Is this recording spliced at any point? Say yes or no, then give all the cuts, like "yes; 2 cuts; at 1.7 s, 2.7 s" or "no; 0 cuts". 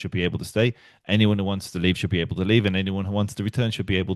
no; 0 cuts